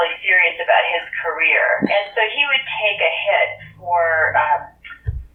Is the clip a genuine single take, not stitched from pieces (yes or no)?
yes